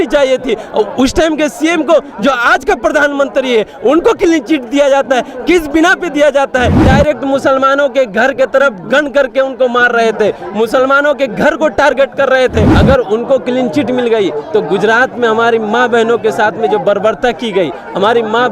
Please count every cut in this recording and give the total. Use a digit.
2